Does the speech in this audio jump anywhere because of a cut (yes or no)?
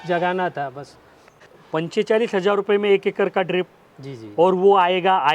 yes